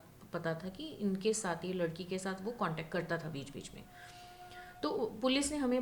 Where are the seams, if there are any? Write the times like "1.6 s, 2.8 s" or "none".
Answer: none